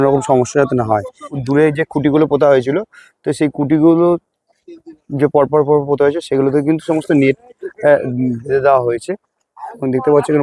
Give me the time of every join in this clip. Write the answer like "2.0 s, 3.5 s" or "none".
1.4 s